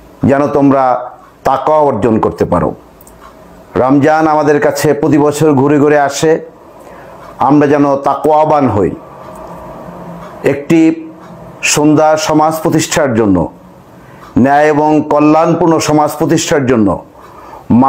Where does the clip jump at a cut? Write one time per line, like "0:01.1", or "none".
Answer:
0:02.1